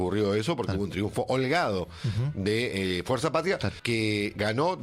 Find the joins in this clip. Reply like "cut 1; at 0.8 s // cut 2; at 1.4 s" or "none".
cut 1; at 3.7 s